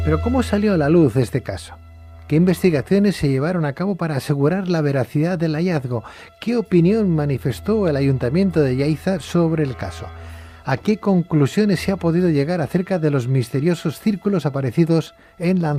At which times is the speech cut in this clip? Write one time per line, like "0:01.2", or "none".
none

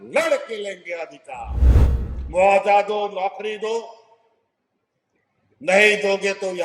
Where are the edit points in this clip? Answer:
0:01.8

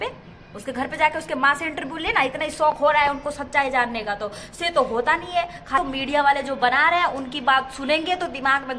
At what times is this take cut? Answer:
0:05.8

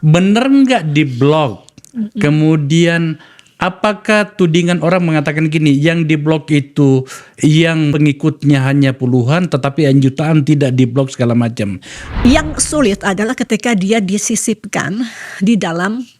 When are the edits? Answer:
0:12.2

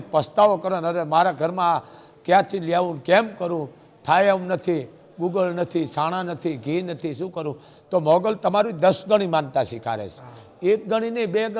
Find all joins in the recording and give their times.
none

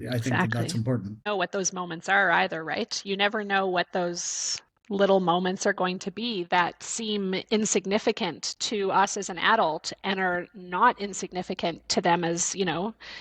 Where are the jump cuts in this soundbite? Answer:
0:01.3

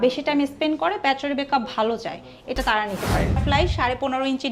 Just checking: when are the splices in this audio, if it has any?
0:03.4

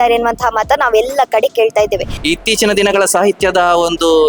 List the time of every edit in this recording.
0:02.1

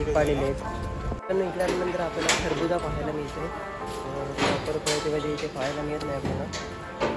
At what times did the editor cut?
none

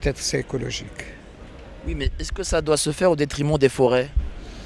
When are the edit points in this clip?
none

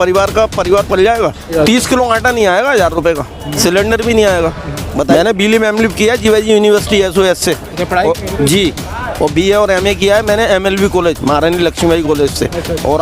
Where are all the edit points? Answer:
0:01.5
0:03.6
0:05.1

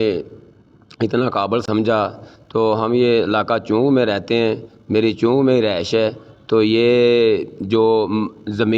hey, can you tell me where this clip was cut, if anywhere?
0:01.6

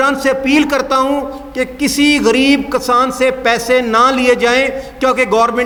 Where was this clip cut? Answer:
none

